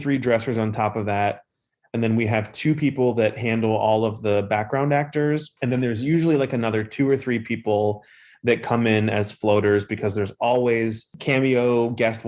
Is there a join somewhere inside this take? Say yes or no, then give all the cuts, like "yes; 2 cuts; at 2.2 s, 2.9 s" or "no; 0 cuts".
no; 0 cuts